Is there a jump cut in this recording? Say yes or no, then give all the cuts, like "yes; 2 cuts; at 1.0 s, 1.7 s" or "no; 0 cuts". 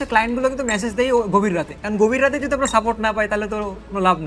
no; 0 cuts